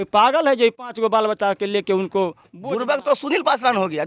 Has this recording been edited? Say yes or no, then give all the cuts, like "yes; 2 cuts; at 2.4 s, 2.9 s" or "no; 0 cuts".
yes; 1 cut; at 2.5 s